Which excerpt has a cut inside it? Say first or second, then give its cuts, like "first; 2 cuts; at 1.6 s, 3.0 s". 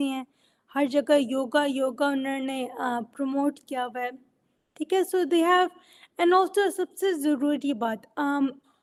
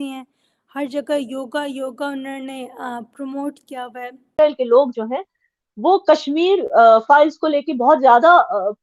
second; 1 cut; at 4.3 s